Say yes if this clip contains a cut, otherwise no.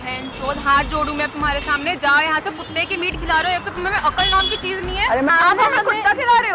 yes